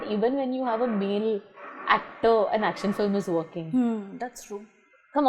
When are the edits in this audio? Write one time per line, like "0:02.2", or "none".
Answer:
none